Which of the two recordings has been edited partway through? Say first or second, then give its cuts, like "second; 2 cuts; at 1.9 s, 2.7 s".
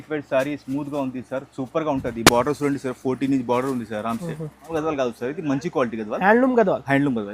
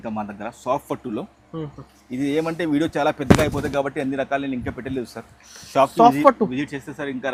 first; 1 cut; at 4.7 s